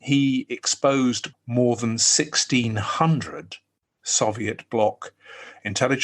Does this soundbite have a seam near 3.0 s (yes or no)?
no